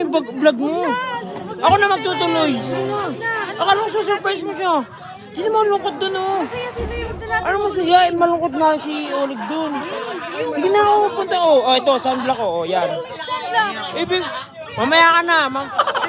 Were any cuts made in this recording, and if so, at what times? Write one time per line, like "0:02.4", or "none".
none